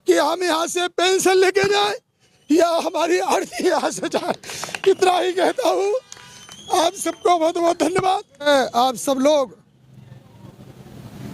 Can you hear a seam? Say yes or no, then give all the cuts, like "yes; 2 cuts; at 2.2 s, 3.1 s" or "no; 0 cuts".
yes; 1 cut; at 8.4 s